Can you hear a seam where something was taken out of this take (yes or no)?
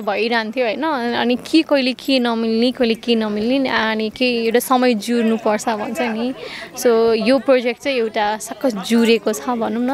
no